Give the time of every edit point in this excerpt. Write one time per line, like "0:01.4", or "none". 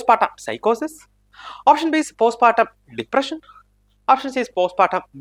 none